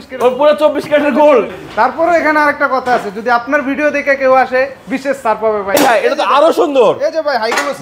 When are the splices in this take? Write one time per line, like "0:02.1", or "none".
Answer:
0:01.6
0:05.7